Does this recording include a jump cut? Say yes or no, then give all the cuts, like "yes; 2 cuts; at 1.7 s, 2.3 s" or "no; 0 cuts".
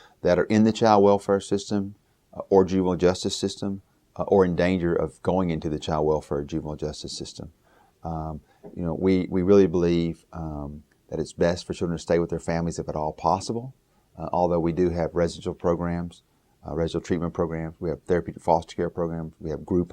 yes; 1 cut; at 7.5 s